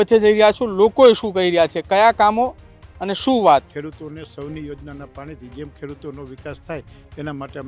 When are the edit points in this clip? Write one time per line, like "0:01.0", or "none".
0:03.7